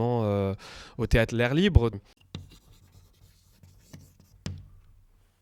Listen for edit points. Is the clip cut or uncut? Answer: cut